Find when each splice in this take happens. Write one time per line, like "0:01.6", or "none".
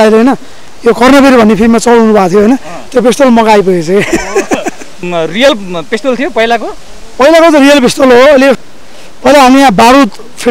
0:05.1
0:08.6

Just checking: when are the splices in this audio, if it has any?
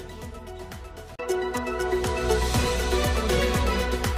none

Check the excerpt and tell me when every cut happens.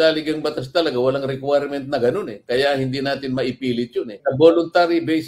0:04.1

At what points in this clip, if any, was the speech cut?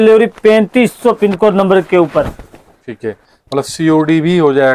none

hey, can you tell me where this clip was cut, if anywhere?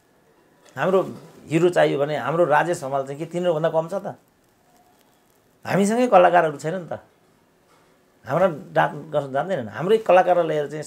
none

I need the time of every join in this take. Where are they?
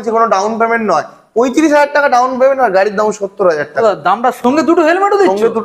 0:04.4

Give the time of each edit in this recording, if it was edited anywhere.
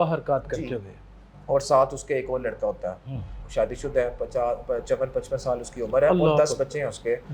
0:03.4

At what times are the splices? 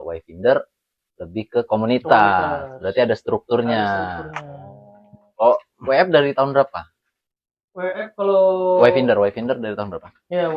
none

